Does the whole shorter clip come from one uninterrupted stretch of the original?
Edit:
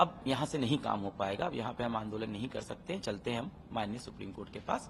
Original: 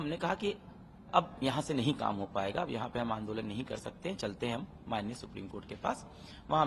yes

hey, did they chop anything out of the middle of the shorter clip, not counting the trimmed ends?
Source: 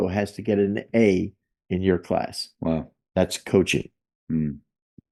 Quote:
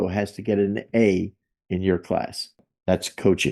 yes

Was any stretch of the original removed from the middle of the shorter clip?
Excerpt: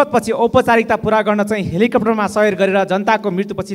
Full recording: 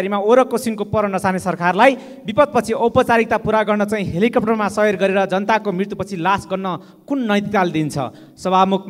no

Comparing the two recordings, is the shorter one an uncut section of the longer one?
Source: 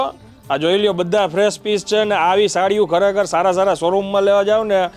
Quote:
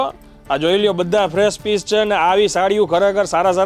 yes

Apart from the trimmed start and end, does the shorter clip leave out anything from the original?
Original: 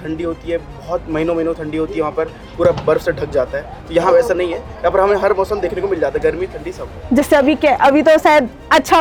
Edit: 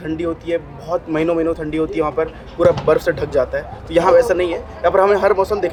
no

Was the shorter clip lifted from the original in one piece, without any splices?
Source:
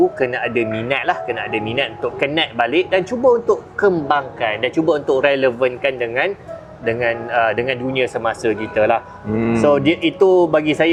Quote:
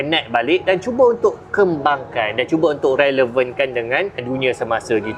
no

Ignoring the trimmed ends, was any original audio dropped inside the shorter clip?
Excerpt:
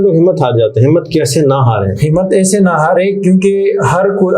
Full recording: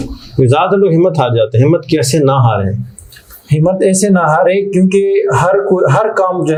yes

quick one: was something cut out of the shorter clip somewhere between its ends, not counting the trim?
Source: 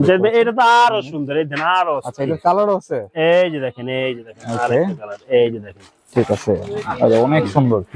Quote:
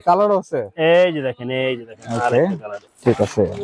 yes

